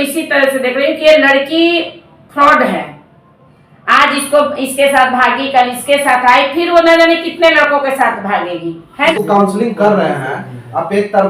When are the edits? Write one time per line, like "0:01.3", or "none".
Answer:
0:09.1